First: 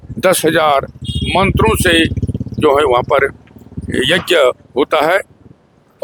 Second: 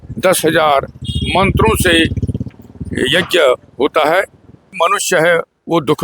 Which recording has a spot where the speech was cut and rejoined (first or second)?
second